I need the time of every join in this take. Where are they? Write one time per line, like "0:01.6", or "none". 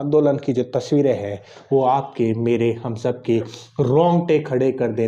none